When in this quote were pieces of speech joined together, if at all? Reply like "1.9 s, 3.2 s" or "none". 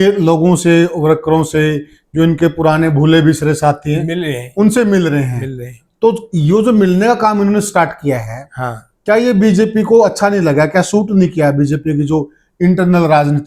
none